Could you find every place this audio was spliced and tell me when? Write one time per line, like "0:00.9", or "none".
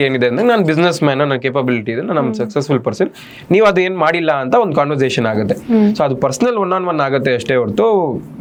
none

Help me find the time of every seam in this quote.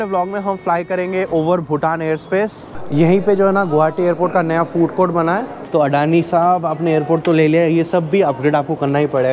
0:02.8
0:05.6

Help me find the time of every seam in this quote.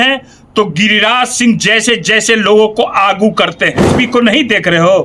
0:03.9

